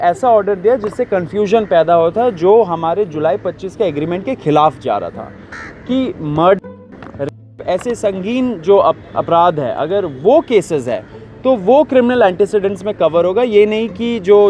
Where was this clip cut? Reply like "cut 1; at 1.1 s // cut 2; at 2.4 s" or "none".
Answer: cut 1; at 5.5 s